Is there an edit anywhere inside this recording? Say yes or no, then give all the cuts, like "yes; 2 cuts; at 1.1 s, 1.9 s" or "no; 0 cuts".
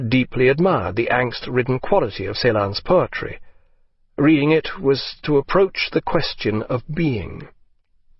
yes; 1 cut; at 5.1 s